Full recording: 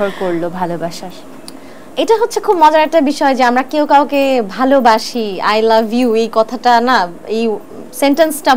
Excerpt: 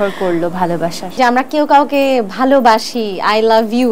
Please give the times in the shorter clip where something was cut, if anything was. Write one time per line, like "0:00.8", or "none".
0:01.2